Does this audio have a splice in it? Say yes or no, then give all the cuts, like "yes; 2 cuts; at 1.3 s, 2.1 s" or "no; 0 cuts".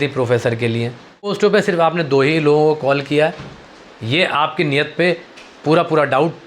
yes; 1 cut; at 1.4 s